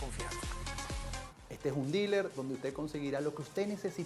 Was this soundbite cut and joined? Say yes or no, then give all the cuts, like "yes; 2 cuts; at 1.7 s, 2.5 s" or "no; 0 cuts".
yes; 1 cut; at 1.4 s